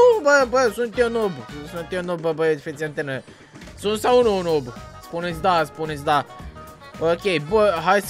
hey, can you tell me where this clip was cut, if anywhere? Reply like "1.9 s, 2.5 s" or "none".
none